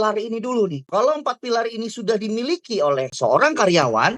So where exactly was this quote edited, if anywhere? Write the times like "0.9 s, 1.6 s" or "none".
0.9 s, 3.1 s